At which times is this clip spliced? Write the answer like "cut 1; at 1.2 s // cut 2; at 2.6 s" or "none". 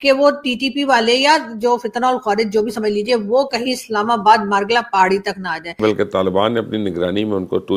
cut 1; at 5.8 s